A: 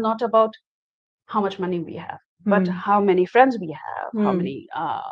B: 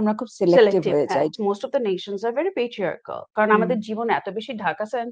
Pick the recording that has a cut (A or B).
B